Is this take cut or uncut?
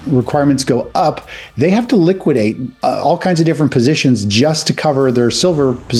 uncut